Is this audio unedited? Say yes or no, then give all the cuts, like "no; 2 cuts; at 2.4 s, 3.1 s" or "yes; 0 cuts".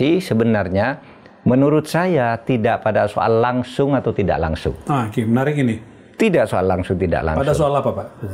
yes; 0 cuts